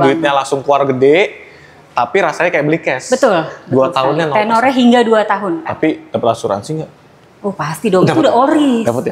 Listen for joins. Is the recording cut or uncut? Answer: uncut